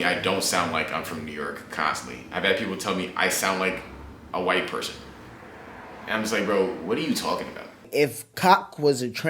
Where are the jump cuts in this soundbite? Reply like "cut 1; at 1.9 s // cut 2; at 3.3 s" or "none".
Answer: cut 1; at 7.8 s